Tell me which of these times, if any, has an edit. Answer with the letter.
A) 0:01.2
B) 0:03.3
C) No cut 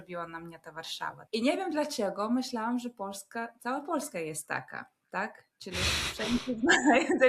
A